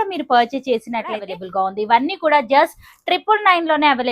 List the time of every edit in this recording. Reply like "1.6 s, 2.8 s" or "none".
1.3 s